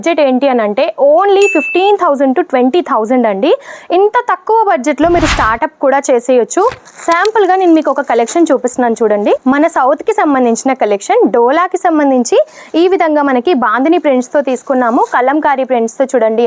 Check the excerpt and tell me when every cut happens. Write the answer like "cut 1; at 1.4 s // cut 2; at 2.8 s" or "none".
cut 1; at 6.9 s // cut 2; at 9.4 s